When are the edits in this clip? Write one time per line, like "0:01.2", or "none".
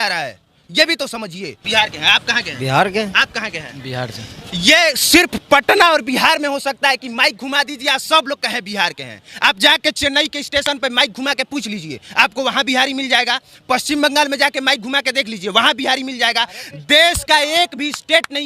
0:01.6